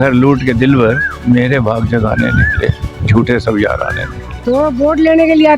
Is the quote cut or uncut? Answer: cut